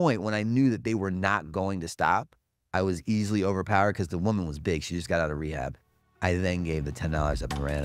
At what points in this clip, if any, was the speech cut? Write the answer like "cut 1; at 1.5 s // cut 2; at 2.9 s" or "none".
none